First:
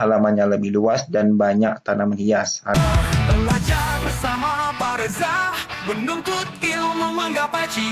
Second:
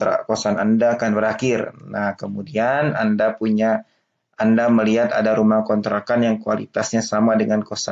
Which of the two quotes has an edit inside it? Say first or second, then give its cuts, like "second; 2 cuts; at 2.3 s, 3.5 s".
first; 1 cut; at 2.7 s